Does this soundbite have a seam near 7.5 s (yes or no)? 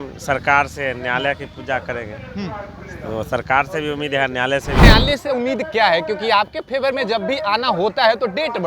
no